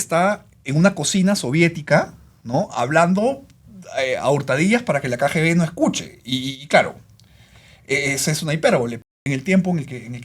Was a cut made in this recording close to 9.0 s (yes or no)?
yes